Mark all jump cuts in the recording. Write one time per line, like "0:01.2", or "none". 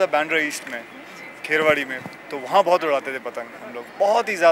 none